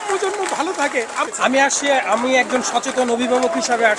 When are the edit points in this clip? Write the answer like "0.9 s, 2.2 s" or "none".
1.3 s